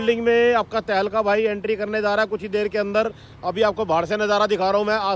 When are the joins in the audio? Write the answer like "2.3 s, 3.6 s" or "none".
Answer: none